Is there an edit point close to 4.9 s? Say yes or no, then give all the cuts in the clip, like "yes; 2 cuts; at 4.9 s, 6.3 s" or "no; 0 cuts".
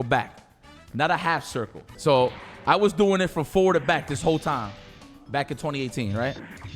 no; 1 cut; at 1.8 s